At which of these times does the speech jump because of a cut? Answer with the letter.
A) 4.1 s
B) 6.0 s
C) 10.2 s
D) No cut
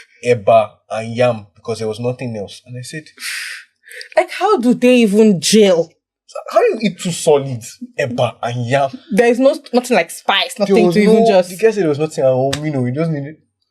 D